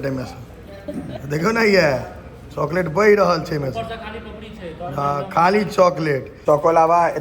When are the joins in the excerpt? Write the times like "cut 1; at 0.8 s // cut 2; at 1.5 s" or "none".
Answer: cut 1; at 6.3 s